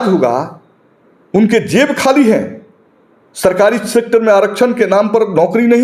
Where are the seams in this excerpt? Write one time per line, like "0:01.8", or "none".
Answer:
none

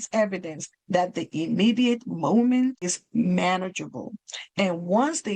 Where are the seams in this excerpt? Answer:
0:03.0

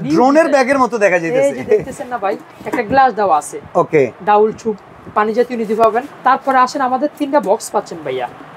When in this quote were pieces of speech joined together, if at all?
0:02.5
0:06.1

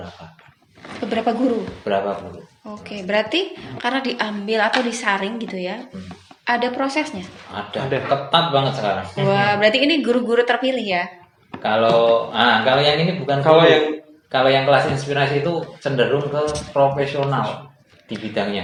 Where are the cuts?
none

